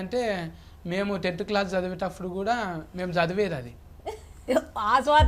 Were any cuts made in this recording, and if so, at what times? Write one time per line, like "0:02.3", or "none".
none